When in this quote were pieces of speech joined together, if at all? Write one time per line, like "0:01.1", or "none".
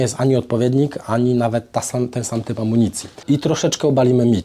0:03.2